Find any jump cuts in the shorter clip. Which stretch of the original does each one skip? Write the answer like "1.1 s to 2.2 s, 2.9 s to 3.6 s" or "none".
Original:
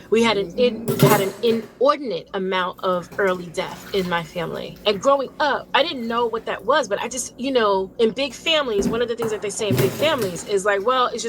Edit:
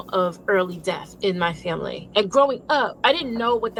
none